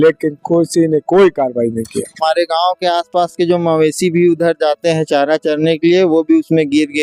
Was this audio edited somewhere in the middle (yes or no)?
yes